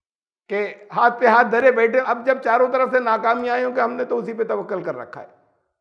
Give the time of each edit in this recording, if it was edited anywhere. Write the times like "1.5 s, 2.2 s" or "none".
2.0 s